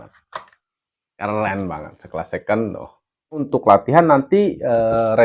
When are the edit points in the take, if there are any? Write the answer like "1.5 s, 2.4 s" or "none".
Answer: 3.4 s